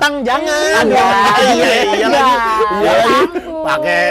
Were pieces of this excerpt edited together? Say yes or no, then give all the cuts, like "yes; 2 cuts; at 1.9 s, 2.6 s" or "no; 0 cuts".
no; 0 cuts